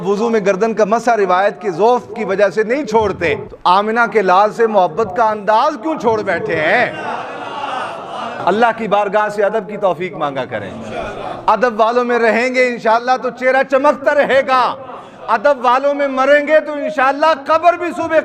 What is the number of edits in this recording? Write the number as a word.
two